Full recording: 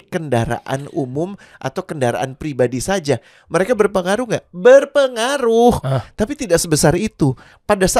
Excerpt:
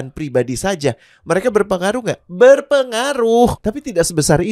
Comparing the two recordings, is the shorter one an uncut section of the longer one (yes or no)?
no